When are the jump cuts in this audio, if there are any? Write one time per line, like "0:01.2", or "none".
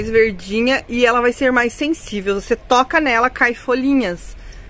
none